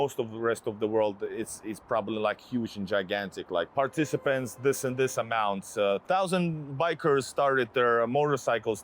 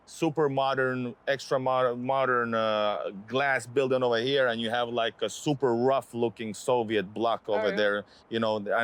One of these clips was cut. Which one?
first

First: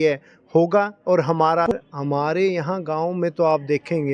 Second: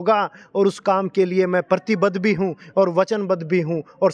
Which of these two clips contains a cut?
first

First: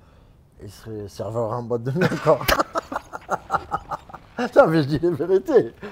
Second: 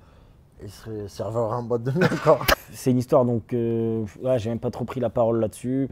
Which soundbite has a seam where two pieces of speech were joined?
second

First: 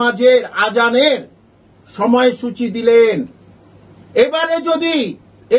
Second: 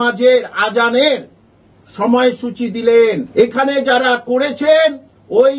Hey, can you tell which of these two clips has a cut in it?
second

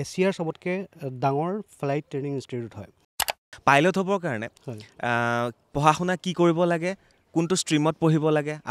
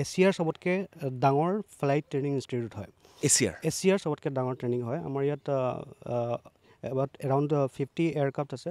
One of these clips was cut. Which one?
first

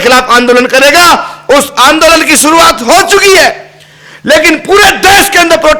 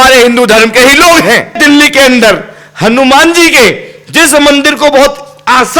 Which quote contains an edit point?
second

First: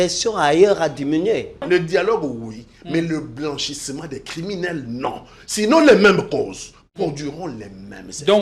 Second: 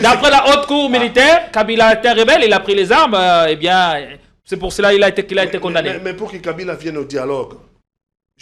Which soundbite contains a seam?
first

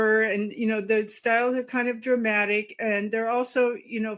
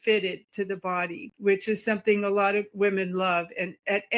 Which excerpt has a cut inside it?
second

